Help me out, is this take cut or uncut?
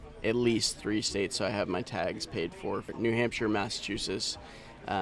cut